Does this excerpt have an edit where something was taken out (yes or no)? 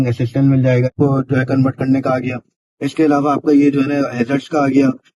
yes